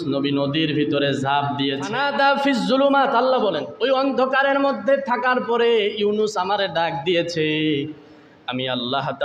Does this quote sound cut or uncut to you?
cut